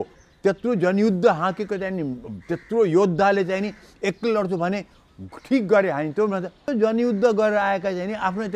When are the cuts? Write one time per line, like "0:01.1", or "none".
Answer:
0:06.6